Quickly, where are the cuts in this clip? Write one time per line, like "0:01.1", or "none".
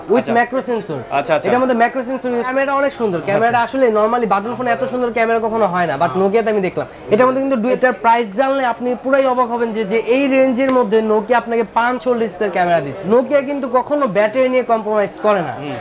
0:02.5
0:07.8
0:12.9

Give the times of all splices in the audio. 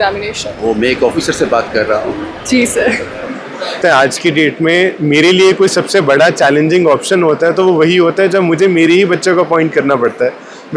0:03.8

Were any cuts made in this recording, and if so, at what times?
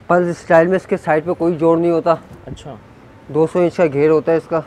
none

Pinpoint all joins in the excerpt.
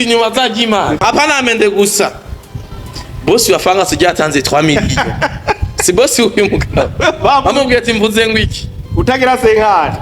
0:01.0

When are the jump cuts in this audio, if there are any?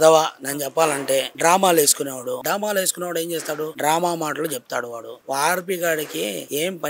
0:05.2

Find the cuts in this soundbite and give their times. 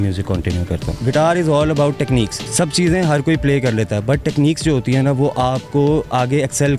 0:00.9
0:02.4

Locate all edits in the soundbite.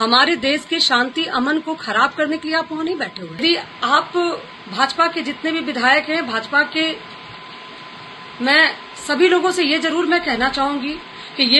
0:03.4

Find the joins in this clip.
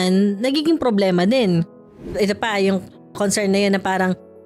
0:02.1

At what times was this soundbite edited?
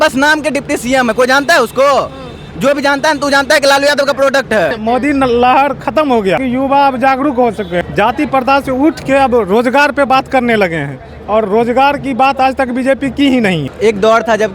0:04.7
0:06.4
0:07.8
0:13.7

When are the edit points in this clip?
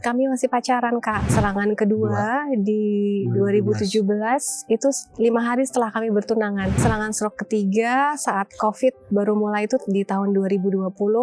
0:01.3
0:06.8

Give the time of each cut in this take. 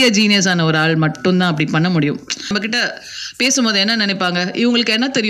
0:02.4

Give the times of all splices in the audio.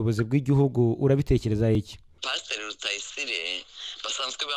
0:02.2

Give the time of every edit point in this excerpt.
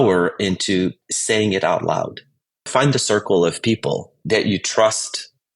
0:01.1
0:02.6

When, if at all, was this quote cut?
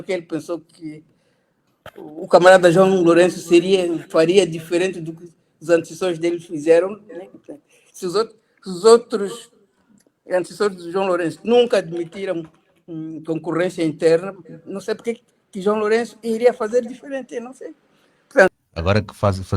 0:18.5

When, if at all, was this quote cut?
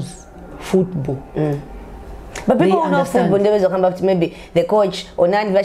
none

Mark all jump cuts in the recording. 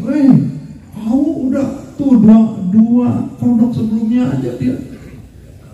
none

